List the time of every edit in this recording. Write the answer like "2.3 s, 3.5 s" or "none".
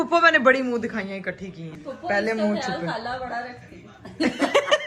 1.7 s